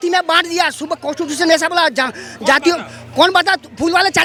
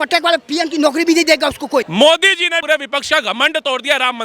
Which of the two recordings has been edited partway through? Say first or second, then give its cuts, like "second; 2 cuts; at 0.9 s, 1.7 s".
second; 2 cuts; at 1.9 s, 2.6 s